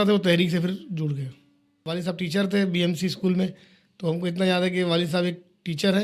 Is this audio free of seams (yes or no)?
no